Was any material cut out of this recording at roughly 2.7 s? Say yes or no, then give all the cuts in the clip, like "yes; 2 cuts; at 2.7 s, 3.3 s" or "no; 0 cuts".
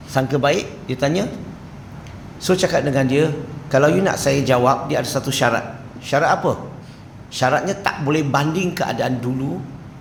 no; 0 cuts